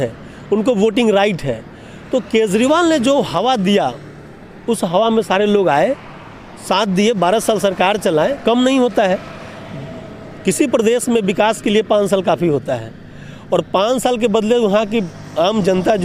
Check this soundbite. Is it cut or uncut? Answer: uncut